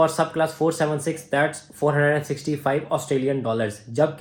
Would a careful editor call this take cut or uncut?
uncut